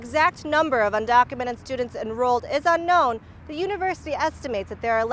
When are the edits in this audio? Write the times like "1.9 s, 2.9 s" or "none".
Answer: none